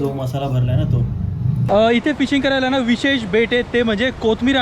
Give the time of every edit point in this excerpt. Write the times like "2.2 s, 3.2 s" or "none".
1.6 s